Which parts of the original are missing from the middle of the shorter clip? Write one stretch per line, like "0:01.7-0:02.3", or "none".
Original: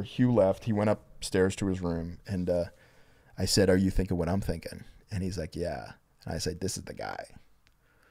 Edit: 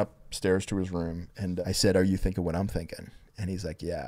0:02.5-0:03.3

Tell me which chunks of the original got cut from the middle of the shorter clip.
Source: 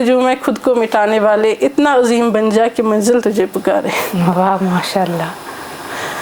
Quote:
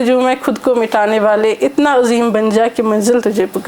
none

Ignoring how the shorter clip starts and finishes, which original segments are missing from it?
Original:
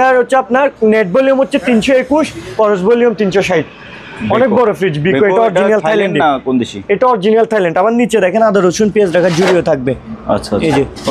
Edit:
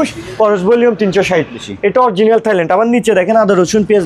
0:03.9-0:06.7

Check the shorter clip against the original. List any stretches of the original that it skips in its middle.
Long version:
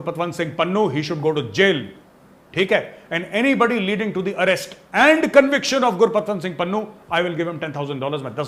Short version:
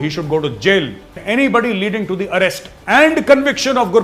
0:02.0-0:03.1

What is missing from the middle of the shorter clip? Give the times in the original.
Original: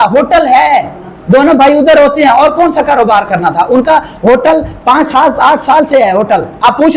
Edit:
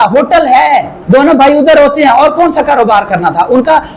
0:00.9-0:01.1

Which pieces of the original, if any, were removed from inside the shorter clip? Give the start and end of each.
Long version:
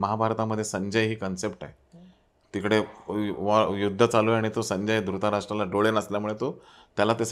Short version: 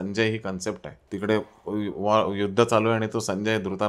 0:01.7-0:02.4

